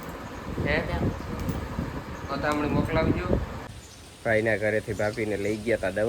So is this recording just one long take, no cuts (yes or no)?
no